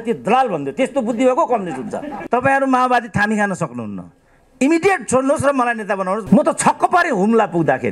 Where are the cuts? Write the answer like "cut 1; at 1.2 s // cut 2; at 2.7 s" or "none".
cut 1; at 2.1 s // cut 2; at 6.2 s